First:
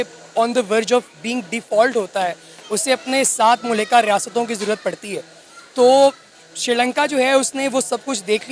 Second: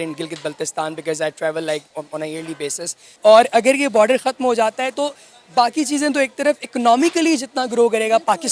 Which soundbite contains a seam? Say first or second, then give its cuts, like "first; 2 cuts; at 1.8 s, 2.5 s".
second; 1 cut; at 3.0 s